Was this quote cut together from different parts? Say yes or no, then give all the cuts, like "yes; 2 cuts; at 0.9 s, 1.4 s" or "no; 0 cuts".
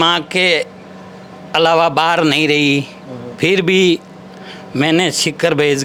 no; 0 cuts